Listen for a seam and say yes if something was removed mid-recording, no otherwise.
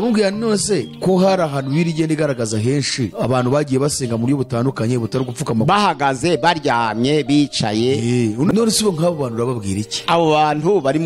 yes